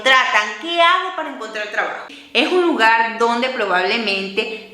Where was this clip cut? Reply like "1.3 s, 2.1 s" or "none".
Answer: 2.0 s